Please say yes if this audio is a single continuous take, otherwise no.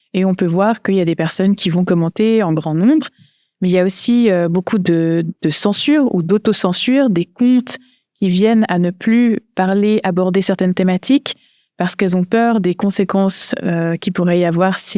yes